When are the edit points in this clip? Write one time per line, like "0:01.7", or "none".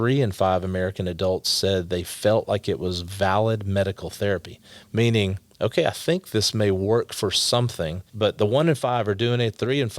0:05.4
0:08.0